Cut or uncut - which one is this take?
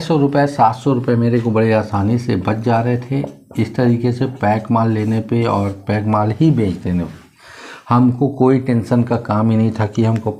uncut